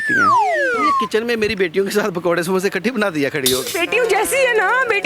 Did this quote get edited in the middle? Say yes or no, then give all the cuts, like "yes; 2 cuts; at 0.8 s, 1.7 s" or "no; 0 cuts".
yes; 1 cut; at 1.0 s